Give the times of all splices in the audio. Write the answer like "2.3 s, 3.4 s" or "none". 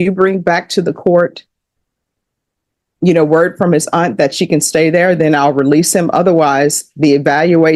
none